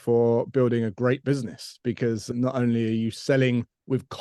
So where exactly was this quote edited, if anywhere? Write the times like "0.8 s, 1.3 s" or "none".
2.2 s